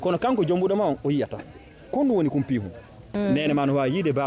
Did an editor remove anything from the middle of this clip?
yes; 1 cut; at 3.0 s

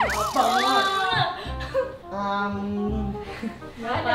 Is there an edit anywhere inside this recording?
no; 0 cuts

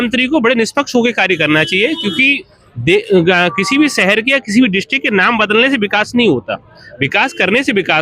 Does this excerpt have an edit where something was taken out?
no; 0 cuts

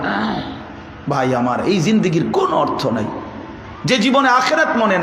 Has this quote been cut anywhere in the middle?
no; 0 cuts

